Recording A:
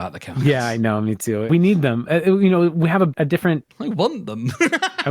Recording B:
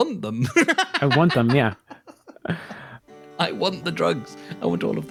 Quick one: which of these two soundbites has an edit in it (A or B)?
A